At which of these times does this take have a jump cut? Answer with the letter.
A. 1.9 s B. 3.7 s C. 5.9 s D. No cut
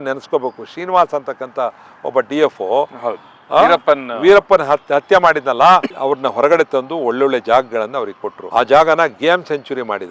C